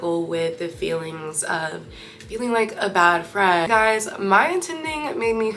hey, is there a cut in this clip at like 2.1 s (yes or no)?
no